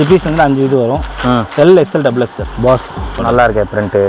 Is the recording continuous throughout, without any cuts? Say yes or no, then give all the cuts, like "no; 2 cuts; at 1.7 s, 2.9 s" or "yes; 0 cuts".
no; 2 cuts; at 2.4 s, 3.2 s